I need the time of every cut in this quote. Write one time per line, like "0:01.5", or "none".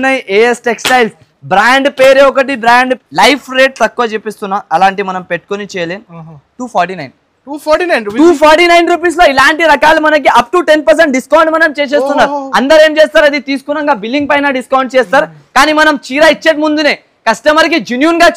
0:03.0

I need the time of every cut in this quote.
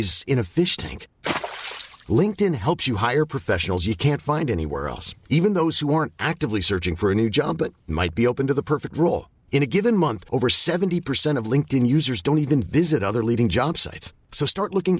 none

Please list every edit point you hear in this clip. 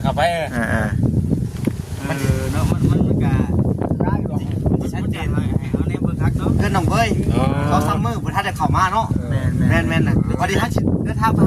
0:06.6

